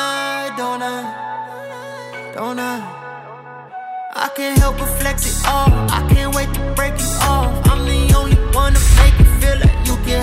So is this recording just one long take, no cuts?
yes; 0 cuts

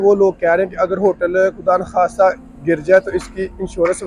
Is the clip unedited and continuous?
yes; 0 cuts

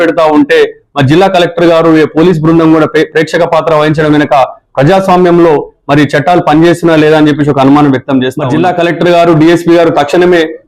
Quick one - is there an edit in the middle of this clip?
yes; 1 cut; at 8.4 s

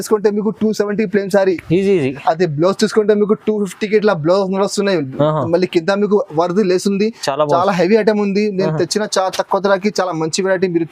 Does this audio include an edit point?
no; 0 cuts

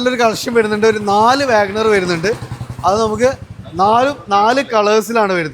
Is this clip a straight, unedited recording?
yes; 0 cuts

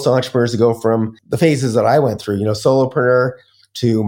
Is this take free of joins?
no; 1 cut; at 1.2 s

